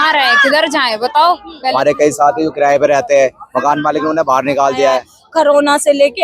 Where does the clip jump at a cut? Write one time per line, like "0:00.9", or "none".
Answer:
0:01.5
0:05.2